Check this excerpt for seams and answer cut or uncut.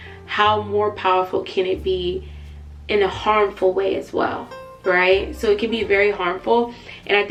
uncut